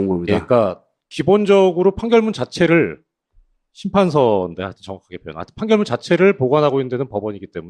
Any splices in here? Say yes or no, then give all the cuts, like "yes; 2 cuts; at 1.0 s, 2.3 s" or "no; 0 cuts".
yes; 1 cut; at 6.5 s